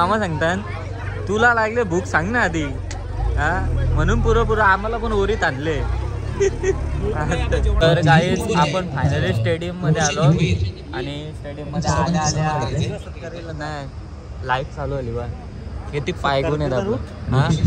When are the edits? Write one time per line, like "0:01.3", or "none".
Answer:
0:07.7